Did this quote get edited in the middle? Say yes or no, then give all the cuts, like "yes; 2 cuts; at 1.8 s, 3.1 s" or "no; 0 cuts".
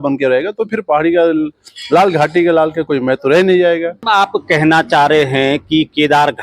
yes; 1 cut; at 4.0 s